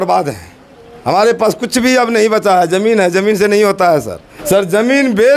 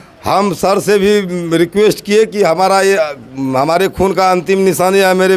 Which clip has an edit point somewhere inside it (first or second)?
first